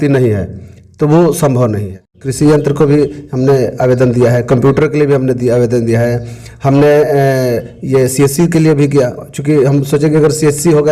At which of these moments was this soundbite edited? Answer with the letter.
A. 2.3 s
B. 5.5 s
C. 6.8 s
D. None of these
A